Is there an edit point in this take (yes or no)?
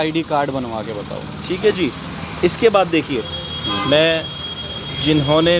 no